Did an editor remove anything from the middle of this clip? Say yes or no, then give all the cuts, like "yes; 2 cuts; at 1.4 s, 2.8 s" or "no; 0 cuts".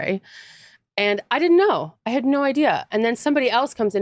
no; 0 cuts